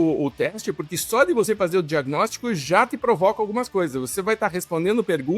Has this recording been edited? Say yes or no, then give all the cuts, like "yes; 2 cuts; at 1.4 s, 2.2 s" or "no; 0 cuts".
no; 0 cuts